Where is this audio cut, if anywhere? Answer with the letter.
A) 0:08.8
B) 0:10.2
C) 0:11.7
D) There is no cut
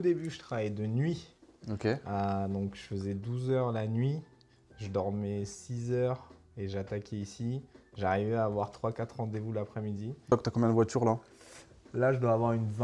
B